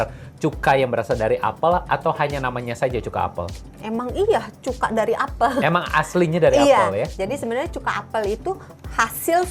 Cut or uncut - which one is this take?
uncut